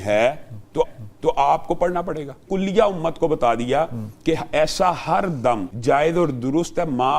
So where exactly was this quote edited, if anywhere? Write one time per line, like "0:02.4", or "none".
0:02.4
0:05.7